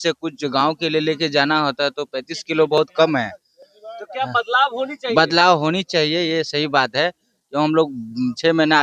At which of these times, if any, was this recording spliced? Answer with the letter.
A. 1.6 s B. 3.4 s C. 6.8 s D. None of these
D